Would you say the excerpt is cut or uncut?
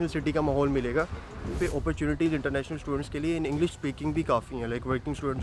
cut